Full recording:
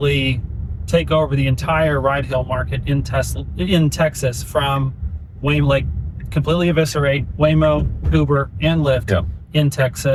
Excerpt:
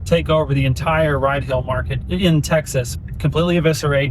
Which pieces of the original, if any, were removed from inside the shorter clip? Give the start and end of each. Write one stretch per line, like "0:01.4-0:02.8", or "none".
0:02.7-0:03.4
0:04.4-0:06.1